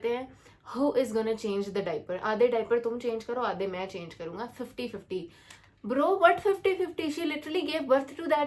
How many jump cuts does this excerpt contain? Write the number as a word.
zero